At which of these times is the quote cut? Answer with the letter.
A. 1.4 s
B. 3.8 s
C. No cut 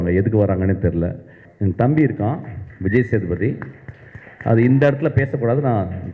A